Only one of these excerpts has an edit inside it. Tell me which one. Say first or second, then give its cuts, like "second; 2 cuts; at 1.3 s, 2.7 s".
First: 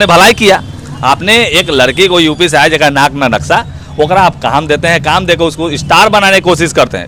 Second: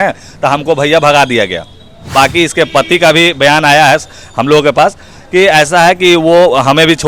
second; 1 cut; at 2.1 s